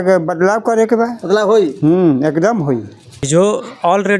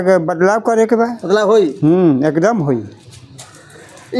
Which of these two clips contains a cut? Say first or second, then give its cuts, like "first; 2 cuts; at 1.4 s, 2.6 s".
first; 1 cut; at 3.3 s